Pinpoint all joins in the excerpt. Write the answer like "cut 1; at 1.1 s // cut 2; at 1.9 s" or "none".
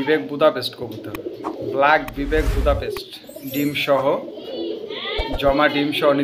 none